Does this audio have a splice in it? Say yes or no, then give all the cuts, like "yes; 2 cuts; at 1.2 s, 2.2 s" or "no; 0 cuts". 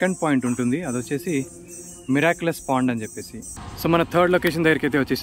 yes; 1 cut; at 3.5 s